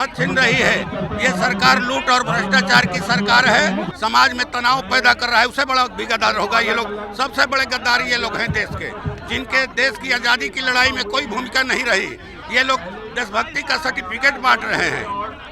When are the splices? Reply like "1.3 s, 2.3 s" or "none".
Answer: 3.9 s